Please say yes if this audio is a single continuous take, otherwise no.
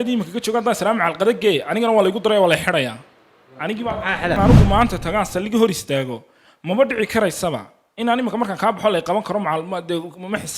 no